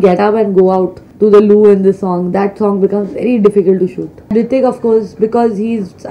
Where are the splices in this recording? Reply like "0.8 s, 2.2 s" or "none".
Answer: 1.0 s, 4.3 s